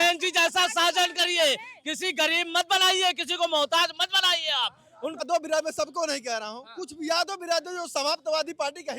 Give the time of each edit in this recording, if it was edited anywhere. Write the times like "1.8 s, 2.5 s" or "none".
5.2 s